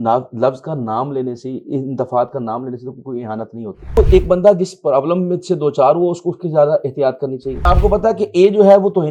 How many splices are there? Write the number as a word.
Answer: two